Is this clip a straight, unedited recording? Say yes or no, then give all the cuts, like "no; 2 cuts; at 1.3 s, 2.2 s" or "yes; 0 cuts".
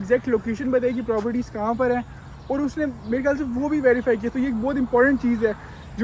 yes; 0 cuts